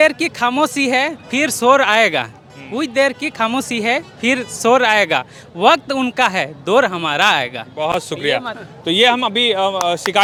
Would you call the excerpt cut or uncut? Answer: uncut